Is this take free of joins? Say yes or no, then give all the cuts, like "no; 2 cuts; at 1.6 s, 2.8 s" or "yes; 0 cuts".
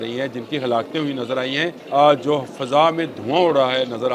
no; 1 cut; at 1.8 s